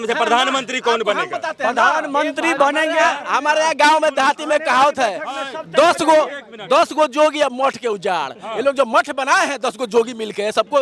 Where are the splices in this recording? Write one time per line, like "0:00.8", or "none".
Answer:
none